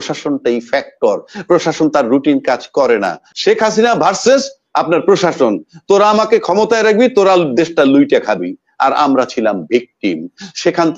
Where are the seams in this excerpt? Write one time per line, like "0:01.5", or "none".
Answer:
0:03.3